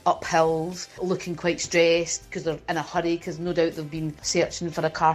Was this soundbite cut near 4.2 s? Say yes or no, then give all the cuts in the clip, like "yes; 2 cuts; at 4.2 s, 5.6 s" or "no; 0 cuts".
yes; 2 cuts; at 1.0 s, 4.2 s